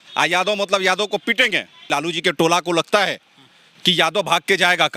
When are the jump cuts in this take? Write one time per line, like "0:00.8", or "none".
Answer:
0:01.9

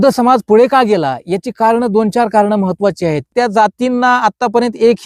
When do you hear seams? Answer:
0:03.2

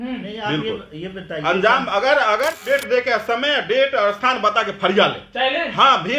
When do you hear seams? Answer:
0:02.8

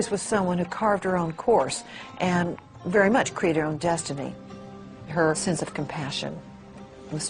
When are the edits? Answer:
none

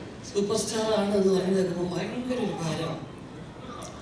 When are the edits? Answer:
none

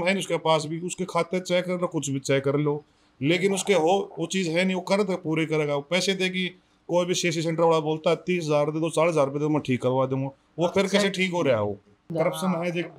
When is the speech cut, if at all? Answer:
0:12.1

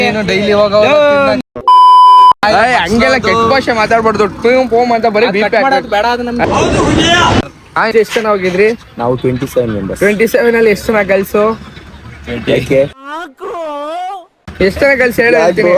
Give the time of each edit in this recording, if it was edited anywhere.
0:07.9

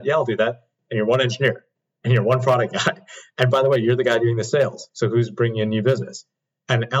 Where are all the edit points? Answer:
none

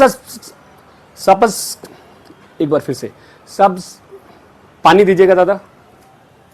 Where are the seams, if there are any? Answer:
none

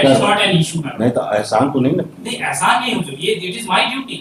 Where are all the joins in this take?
none

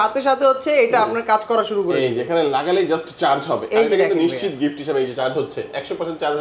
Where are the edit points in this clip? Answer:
none

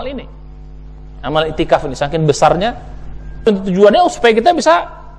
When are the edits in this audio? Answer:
0:03.4

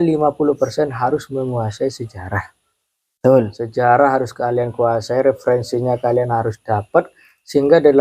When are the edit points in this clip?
none

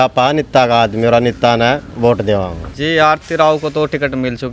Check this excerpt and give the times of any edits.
0:02.6

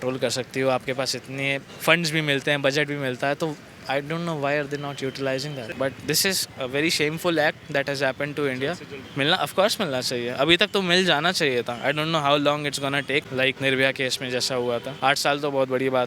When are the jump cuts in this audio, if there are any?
0:01.7
0:05.7
0:09.0
0:13.4
0:14.9

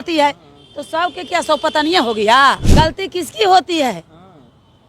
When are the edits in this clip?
0:02.6

